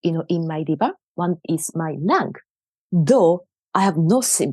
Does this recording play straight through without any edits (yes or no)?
yes